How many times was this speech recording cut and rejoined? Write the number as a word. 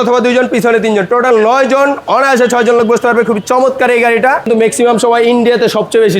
one